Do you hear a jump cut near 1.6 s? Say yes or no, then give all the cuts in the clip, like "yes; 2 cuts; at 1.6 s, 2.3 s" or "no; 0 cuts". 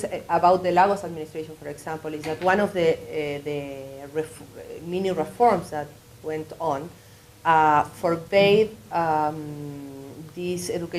no; 1 cut; at 6.7 s